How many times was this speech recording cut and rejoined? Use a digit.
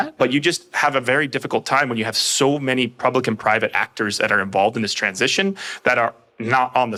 0